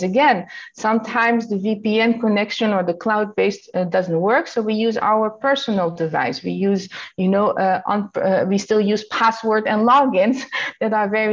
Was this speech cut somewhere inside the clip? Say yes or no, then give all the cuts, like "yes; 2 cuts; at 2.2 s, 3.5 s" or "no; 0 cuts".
no; 0 cuts